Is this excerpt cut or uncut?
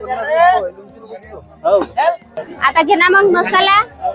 cut